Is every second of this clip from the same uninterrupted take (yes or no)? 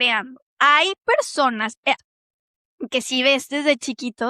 no